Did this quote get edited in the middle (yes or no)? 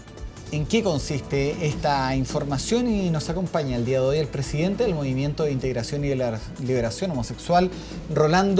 yes